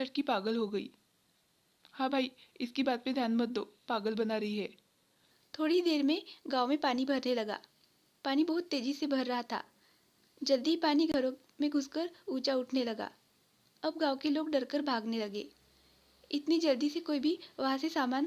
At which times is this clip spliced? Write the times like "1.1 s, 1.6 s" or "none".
none